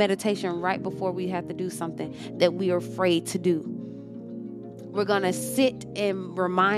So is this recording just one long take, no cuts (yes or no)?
no